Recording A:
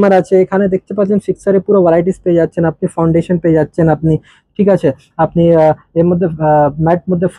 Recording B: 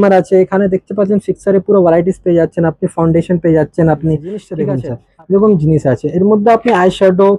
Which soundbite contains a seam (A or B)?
B